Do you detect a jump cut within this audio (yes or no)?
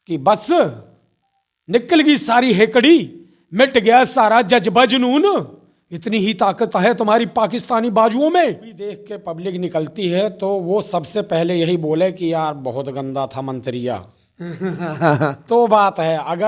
yes